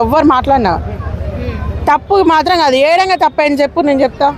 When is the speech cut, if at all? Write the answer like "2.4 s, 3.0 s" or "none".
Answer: none